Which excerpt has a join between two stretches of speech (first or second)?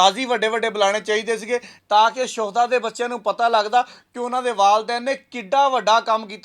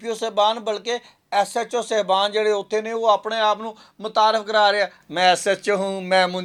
first